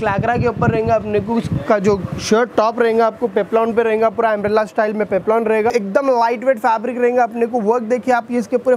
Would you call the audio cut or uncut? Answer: cut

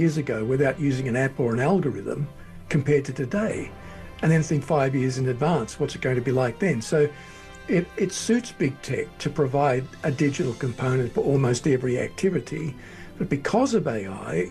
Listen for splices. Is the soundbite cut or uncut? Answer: uncut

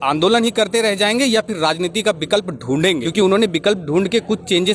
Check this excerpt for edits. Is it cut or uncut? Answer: uncut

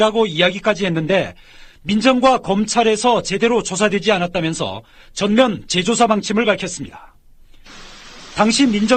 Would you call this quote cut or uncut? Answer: uncut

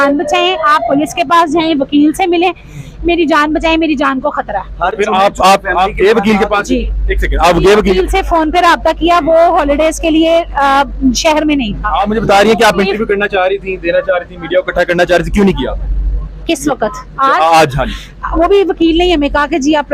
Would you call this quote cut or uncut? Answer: uncut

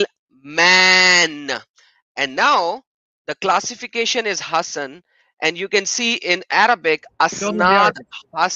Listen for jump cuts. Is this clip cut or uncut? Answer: uncut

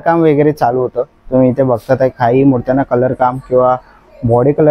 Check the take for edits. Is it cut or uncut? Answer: uncut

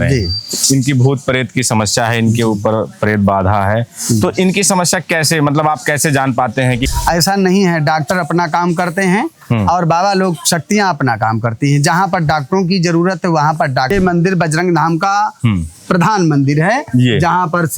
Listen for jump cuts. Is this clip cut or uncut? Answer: cut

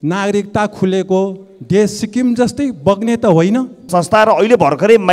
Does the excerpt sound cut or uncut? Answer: cut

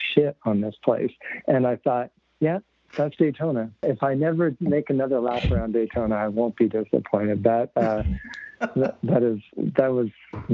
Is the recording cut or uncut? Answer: cut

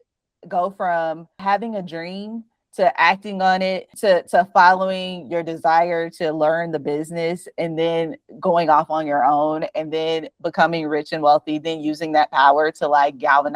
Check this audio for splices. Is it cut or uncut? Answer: cut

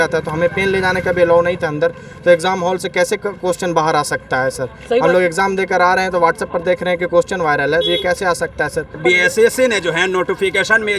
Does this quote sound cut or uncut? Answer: cut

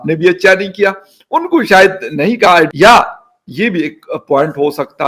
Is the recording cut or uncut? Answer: cut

